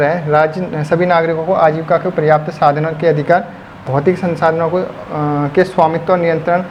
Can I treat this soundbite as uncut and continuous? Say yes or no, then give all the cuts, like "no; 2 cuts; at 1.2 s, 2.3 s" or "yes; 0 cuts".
yes; 0 cuts